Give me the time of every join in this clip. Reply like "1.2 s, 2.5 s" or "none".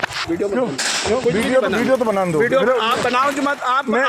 none